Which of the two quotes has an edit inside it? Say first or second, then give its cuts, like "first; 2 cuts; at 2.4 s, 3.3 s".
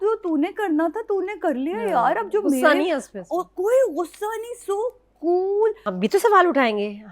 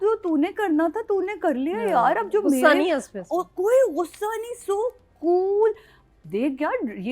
first; 1 cut; at 5.9 s